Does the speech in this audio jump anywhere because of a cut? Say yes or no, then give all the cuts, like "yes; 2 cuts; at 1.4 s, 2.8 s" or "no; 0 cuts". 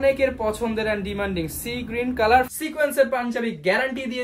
yes; 1 cut; at 2.5 s